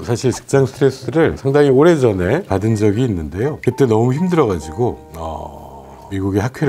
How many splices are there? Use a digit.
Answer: 0